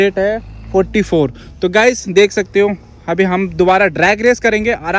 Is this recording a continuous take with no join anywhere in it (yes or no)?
yes